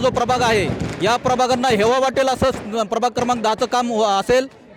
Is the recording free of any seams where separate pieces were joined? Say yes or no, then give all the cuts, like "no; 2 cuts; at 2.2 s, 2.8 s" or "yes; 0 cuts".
yes; 0 cuts